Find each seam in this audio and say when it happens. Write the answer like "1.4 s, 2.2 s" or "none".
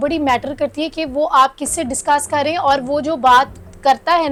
none

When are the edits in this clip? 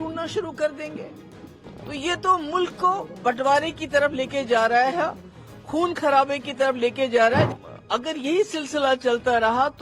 7.5 s

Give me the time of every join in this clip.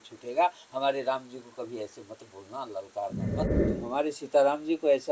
3.6 s

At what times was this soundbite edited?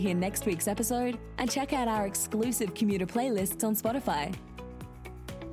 none

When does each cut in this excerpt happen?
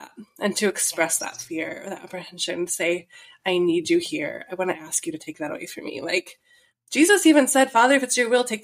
none

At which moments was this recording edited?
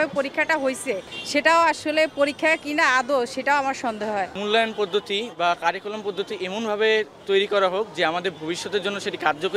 1.1 s, 4.4 s

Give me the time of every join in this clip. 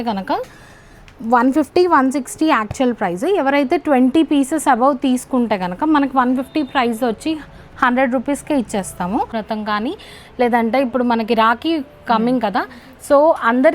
9.1 s

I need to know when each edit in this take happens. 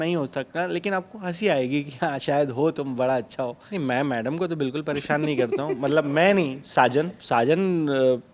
3.6 s, 7.2 s

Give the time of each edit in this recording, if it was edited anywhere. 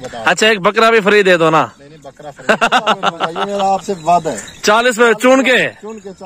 3.3 s

